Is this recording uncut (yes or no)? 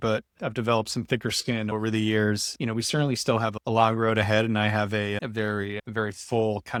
yes